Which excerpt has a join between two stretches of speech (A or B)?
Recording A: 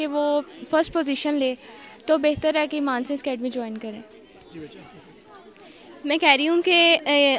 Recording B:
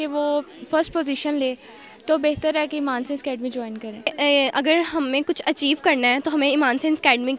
B